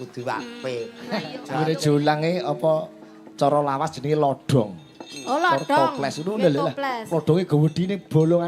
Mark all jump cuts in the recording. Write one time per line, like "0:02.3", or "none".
0:01.3